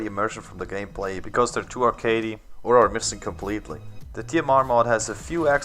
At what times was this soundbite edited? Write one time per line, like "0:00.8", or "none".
0:01.0